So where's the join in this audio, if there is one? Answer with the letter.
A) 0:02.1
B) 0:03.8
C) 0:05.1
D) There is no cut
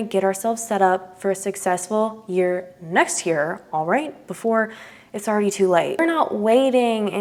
D